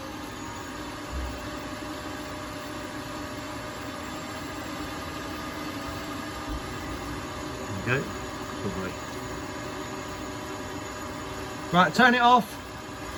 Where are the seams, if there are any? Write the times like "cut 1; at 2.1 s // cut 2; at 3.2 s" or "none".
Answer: none